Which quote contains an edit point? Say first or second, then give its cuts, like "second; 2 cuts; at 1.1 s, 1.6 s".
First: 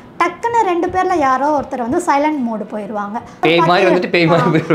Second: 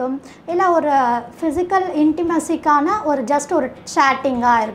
first; 1 cut; at 3.4 s